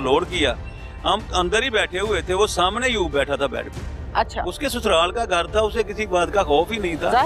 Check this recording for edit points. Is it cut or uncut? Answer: uncut